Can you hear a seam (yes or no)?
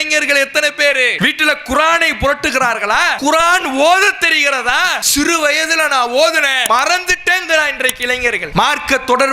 yes